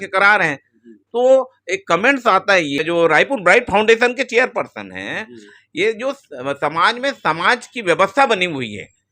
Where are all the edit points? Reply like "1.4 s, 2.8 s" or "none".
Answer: 2.8 s